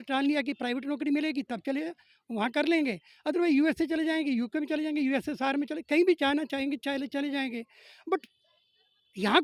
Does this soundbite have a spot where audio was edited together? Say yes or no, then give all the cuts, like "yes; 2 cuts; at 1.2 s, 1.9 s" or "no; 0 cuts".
no; 0 cuts